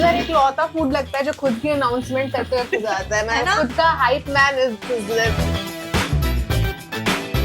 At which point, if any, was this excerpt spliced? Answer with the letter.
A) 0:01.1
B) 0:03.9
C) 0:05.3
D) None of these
C